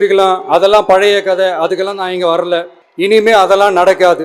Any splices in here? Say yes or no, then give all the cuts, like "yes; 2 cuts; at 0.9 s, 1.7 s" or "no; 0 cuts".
yes; 1 cut; at 2.8 s